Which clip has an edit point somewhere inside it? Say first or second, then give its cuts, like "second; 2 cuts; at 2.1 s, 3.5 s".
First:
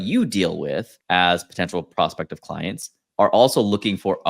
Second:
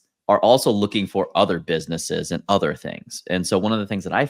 first; 1 cut; at 0.9 s